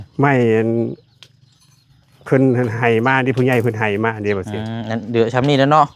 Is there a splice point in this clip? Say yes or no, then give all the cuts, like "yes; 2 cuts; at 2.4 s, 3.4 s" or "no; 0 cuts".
no; 0 cuts